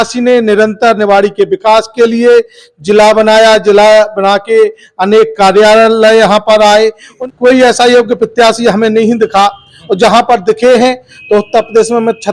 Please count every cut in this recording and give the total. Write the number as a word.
one